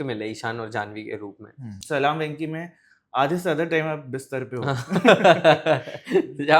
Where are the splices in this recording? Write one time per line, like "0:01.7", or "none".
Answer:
0:01.8